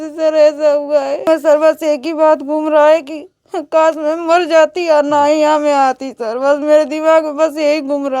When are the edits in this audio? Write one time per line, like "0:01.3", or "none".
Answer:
0:01.3